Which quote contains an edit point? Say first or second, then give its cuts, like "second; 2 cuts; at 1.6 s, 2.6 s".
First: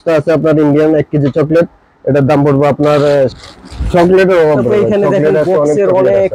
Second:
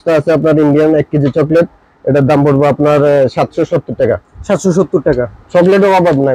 first; 1 cut; at 3.3 s